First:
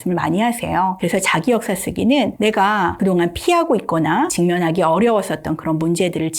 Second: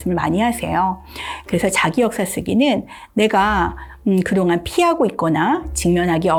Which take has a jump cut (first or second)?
first